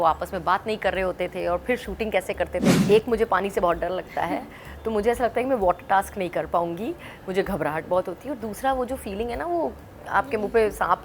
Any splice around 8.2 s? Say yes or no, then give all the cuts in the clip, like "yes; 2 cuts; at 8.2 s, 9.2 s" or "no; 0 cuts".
no; 1 cut; at 2.8 s